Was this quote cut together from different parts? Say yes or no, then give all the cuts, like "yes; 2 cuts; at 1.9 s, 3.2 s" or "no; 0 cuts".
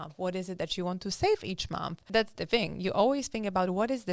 yes; 1 cut; at 2.0 s